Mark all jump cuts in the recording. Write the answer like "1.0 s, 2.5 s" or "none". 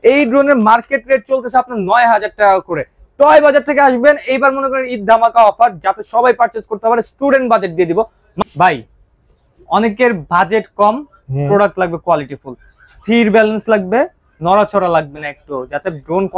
8.2 s